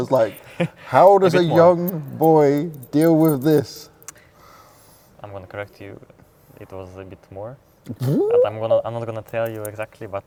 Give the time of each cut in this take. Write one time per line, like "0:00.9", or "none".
none